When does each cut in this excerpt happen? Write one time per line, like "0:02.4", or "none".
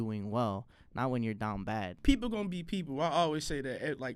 0:01.9